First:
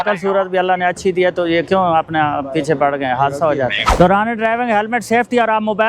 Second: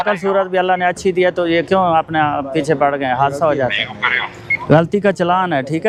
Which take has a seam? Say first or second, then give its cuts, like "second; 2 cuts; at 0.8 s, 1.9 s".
first; 1 cut; at 3.8 s